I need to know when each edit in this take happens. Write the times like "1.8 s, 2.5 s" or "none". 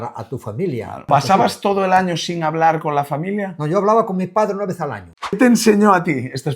1.1 s, 5.3 s